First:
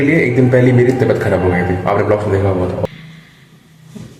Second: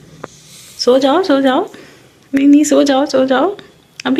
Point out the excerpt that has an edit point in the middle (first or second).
first